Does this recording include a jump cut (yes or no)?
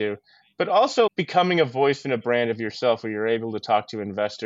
yes